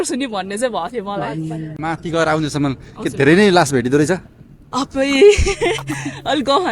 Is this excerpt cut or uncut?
cut